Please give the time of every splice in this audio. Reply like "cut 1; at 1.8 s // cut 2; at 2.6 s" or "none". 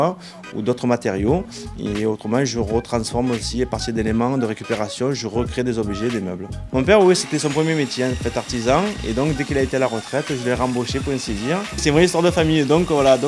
none